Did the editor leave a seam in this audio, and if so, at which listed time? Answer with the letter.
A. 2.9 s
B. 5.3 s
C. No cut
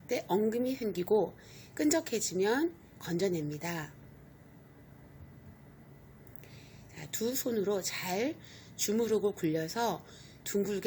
B